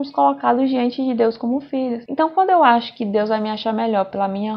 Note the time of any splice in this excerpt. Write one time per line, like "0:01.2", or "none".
none